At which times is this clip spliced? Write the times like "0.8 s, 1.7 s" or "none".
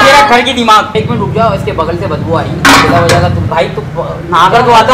0.9 s, 3.4 s